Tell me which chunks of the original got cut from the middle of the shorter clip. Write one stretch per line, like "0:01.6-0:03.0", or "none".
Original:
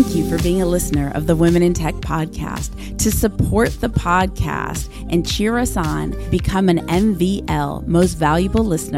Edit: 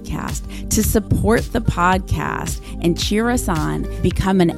none